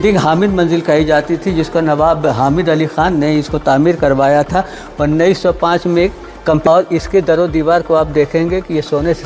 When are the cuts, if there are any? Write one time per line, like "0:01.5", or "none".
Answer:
0:06.7